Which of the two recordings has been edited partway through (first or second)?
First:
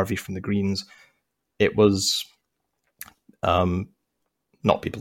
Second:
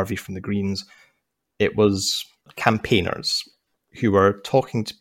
second